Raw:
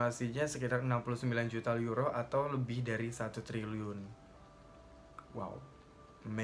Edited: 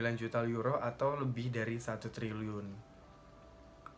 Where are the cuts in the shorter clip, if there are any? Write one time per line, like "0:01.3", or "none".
none

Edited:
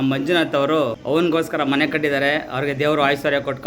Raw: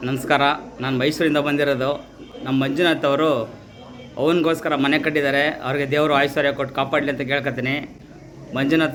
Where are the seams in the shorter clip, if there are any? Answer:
0:01.0

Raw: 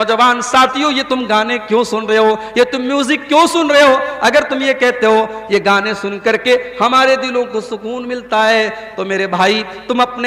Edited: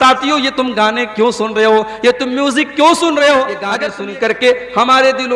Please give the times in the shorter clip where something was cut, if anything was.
0:03.8

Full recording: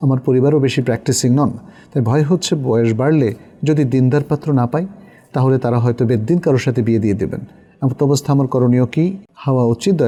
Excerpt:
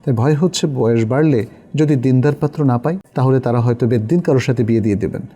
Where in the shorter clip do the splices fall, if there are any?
0:03.1

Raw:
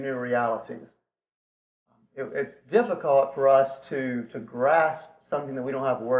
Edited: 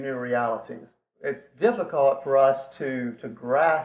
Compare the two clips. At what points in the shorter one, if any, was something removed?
0:01.2

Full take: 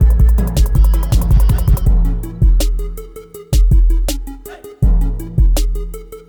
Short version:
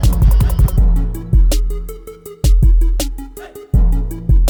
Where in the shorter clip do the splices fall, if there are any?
none

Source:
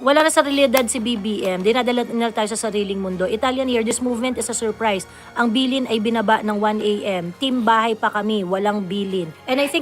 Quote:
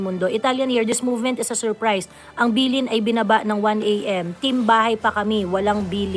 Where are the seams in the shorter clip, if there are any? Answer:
none

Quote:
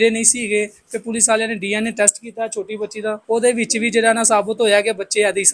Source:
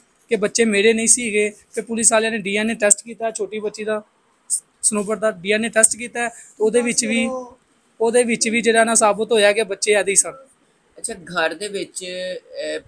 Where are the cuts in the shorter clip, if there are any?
0:03.2

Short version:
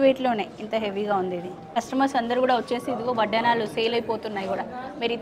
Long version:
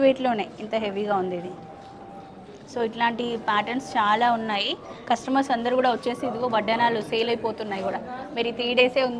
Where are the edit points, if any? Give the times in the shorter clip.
0:01.6

